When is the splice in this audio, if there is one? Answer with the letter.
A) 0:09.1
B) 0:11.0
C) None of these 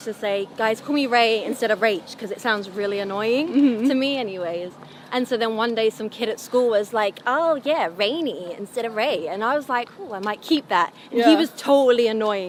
C